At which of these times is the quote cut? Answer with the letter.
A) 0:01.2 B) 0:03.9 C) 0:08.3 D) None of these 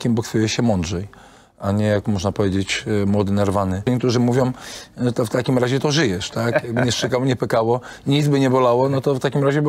B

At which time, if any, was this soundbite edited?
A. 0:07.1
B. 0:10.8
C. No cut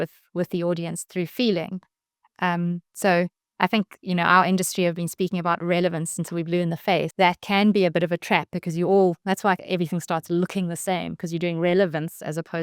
A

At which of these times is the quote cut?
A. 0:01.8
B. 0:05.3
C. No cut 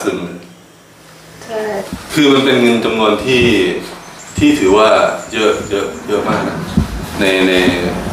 A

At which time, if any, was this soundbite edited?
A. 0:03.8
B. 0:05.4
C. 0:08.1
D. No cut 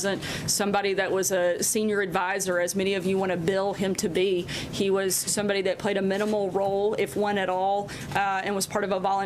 B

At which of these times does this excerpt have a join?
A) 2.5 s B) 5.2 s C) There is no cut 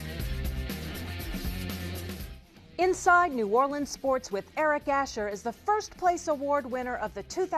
A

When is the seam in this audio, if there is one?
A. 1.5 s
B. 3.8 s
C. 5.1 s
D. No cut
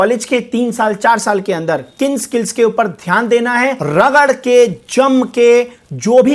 B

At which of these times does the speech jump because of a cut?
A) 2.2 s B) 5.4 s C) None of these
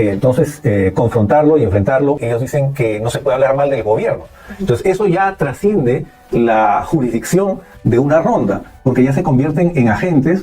A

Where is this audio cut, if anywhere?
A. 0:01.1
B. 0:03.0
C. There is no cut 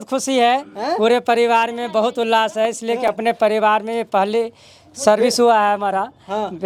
C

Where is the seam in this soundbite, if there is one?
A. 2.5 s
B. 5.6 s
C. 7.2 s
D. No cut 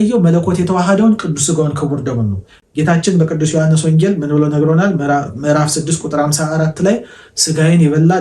D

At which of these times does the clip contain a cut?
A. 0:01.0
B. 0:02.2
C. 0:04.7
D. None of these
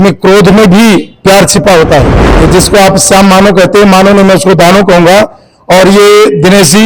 B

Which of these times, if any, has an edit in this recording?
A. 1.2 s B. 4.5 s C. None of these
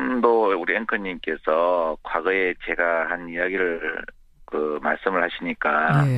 A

